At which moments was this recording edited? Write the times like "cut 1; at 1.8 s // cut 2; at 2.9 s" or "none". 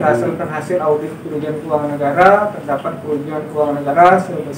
none